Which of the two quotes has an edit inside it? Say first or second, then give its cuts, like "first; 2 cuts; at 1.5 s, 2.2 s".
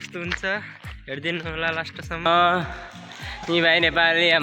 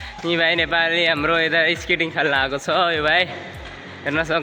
first; 1 cut; at 2.3 s